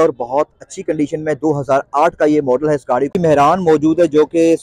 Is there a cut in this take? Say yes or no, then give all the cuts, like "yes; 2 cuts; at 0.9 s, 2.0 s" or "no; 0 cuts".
yes; 1 cut; at 3.1 s